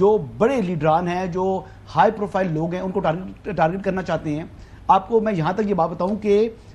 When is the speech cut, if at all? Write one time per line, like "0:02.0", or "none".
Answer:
none